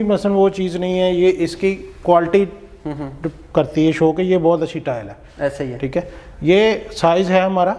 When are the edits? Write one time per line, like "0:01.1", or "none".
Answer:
none